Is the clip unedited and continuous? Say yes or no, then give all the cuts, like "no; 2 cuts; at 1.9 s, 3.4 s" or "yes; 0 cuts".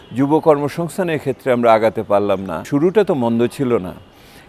no; 1 cut; at 2.7 s